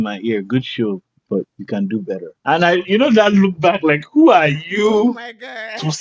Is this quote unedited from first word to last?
no; 2 cuts; at 1.6 s, 2.3 s

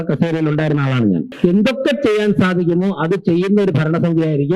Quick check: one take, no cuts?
no; 1 cut; at 1.3 s

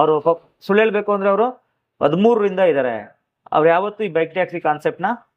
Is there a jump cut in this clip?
no; 0 cuts

